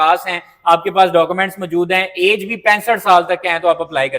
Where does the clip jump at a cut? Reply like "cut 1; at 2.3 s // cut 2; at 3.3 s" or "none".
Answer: none